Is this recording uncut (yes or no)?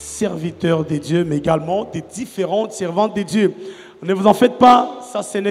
yes